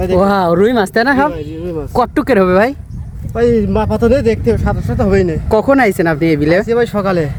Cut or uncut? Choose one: uncut